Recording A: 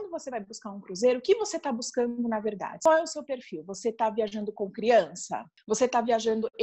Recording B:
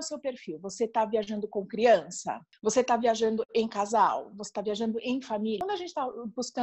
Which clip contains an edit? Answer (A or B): B